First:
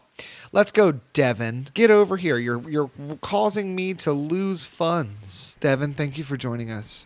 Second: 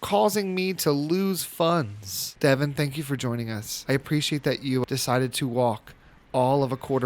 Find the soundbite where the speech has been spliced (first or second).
second